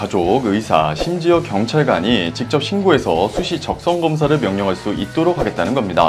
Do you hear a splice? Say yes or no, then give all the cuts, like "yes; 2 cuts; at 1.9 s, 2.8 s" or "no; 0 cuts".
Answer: no; 0 cuts